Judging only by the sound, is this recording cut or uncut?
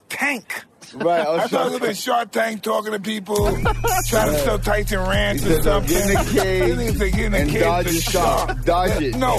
uncut